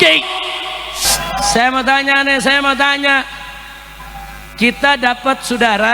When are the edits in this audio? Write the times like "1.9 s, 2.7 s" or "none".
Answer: 1.0 s